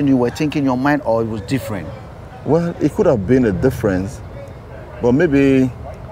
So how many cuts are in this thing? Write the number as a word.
zero